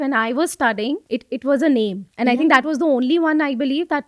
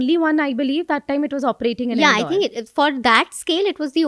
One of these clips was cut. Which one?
first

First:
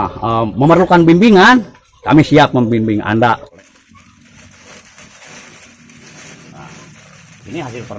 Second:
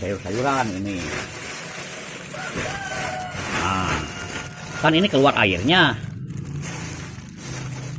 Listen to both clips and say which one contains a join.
first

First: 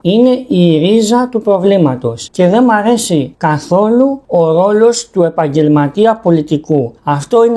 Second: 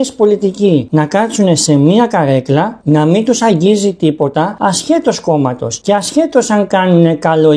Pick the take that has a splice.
first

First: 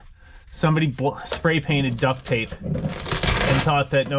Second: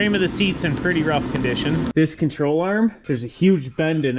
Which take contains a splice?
second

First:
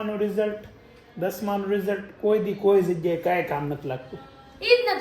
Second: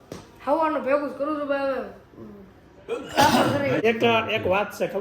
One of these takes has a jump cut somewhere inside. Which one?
second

